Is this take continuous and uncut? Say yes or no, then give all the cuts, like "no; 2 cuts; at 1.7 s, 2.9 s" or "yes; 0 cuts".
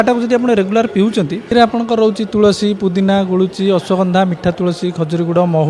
no; 1 cut; at 1.4 s